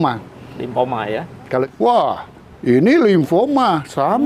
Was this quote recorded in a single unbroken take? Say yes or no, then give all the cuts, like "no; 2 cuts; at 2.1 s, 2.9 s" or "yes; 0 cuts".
no; 1 cut; at 1.7 s